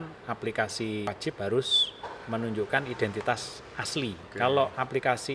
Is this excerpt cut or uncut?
cut